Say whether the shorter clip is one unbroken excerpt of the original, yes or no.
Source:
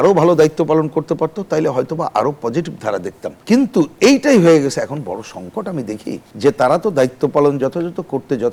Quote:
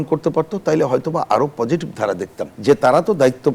no